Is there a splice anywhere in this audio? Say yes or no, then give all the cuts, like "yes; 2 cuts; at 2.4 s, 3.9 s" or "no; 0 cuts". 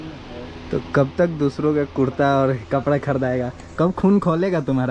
no; 0 cuts